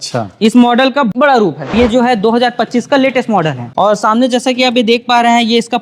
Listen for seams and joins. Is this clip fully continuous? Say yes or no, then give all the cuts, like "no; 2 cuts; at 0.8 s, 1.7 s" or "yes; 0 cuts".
no; 2 cuts; at 1.7 s, 3.6 s